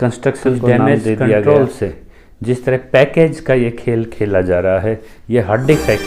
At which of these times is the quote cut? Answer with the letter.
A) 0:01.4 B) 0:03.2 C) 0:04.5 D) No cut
A